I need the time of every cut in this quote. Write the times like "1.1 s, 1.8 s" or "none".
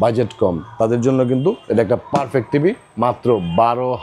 none